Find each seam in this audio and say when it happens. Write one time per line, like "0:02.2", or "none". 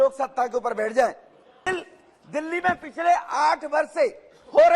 0:01.6